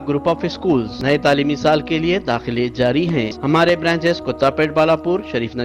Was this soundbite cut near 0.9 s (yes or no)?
yes